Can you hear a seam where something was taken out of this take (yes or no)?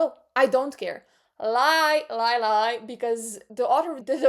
yes